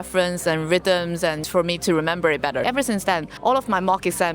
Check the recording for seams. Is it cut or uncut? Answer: cut